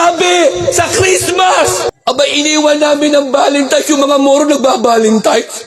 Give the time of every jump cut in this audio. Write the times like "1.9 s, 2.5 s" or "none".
2.0 s

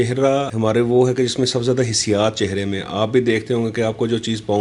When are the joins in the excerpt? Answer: none

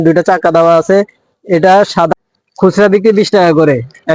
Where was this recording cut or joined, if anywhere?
2.1 s

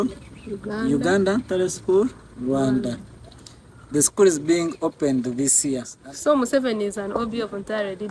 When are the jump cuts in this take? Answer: 5.9 s

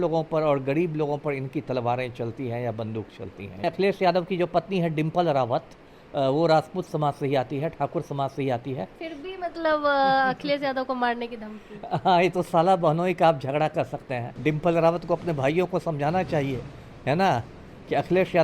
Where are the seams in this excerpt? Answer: 3.6 s, 9.0 s, 14.2 s

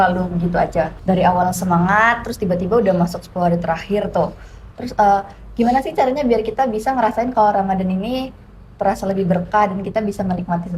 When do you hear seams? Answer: 0.9 s

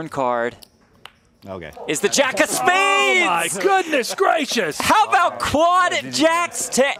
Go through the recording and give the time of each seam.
none

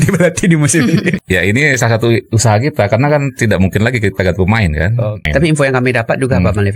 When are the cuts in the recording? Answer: 1.2 s, 5.1 s

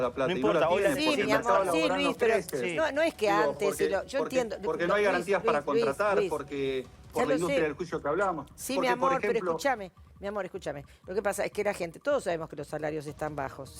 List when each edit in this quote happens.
none

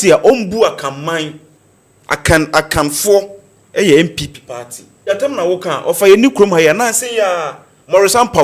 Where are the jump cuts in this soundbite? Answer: 5.1 s

